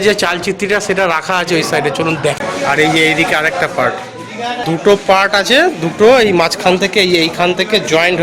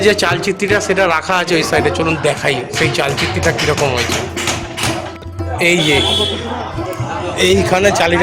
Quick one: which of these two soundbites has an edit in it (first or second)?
first